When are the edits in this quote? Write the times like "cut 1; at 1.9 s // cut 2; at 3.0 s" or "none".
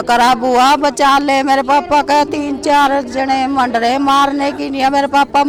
none